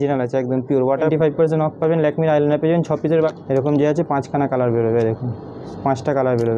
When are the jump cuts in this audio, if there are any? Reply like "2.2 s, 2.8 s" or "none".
1.1 s, 3.4 s